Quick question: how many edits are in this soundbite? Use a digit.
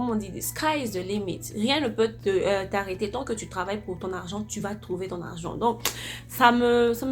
0